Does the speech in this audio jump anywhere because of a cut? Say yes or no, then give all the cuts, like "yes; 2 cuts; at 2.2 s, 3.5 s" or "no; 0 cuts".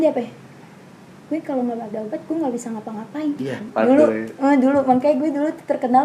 yes; 1 cut; at 3.7 s